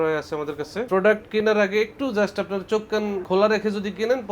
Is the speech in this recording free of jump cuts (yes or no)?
no